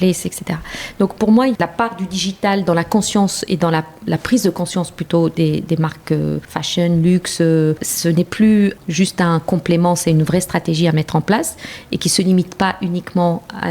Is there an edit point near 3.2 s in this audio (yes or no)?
no